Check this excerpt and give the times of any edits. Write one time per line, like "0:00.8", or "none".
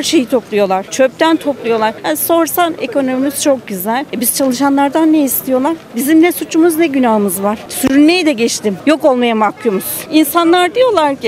0:04.1
0:07.6
0:10.1